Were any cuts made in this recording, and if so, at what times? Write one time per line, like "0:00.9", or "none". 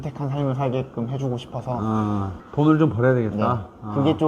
0:02.4

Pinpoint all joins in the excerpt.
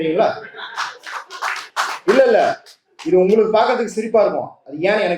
0:01.6

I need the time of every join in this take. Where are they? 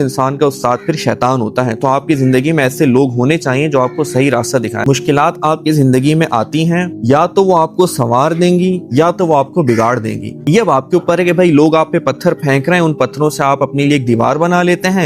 0:04.8
0:06.9
0:10.4

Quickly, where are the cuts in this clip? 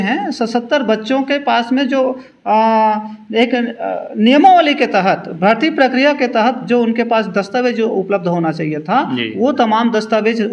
none

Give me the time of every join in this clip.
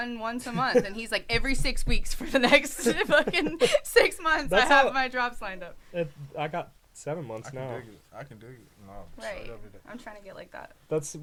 none

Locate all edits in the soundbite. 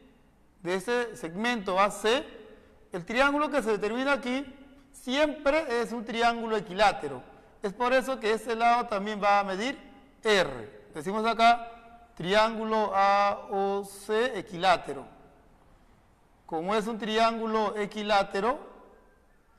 0:14.6

